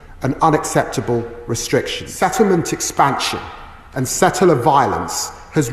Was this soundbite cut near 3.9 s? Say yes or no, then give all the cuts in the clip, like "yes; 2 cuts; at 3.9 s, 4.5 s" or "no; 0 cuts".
no; 1 cut; at 2.0 s